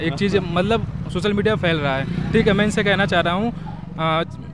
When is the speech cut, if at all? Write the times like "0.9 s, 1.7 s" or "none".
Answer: none